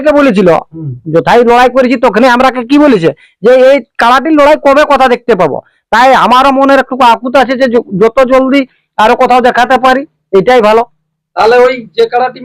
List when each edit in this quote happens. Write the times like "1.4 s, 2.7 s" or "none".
none